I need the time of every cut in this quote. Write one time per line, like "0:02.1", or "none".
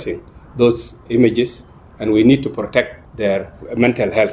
0:03.4